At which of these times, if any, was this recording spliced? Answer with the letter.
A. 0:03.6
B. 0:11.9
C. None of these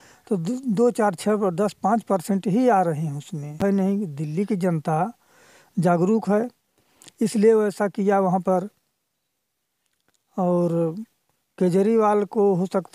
A